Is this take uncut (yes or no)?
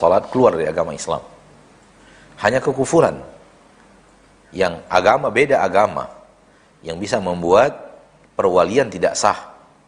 yes